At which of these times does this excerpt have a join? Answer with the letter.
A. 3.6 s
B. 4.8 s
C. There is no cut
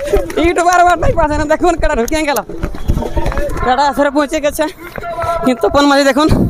A